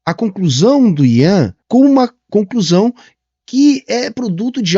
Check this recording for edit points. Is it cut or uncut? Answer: cut